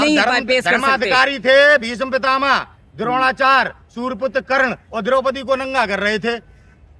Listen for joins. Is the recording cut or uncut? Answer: uncut